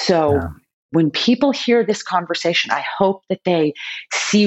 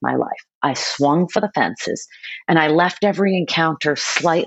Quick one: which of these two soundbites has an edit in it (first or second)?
first